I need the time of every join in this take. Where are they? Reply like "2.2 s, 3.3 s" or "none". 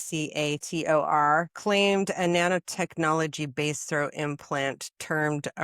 1.5 s